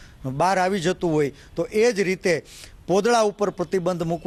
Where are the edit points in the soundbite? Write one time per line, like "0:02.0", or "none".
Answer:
none